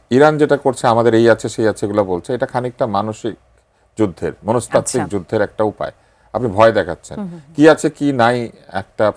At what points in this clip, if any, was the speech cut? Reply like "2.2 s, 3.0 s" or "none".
none